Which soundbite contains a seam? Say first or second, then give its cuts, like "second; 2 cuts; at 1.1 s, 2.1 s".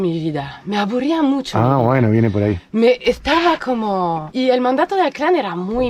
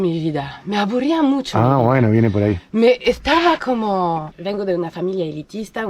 second; 1 cut; at 4.3 s